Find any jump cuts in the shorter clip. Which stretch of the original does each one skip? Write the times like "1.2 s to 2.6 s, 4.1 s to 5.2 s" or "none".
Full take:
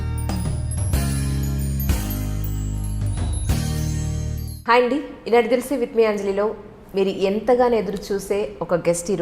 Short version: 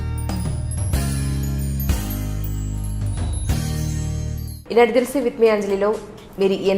4.6 s to 5.1 s